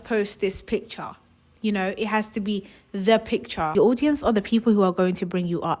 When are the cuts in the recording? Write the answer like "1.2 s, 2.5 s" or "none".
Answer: 3.7 s

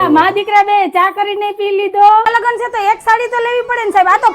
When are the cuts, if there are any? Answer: 2.3 s

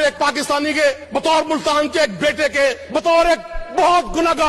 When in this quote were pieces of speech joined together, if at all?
1.0 s, 2.8 s

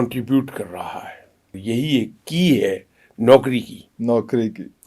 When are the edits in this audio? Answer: 1.6 s

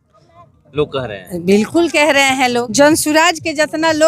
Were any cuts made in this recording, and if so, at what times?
2.7 s

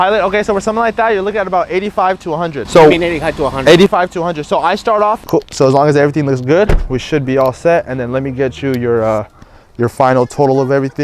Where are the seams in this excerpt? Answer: 2.6 s, 5.2 s

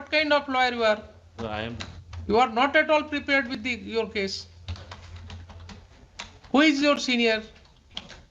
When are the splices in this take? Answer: none

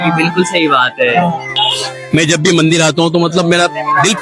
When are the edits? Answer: 1.5 s

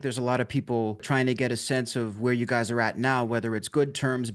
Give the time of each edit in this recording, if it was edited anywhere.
none

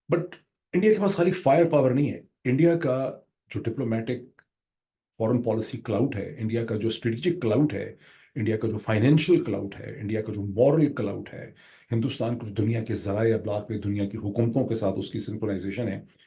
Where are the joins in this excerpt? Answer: none

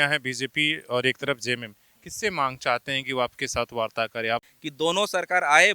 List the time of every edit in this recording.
4.6 s

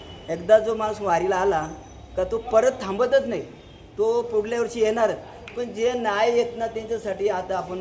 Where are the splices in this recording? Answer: none

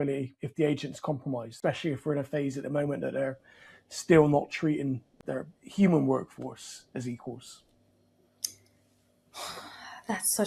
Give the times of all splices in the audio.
1.5 s, 5.2 s

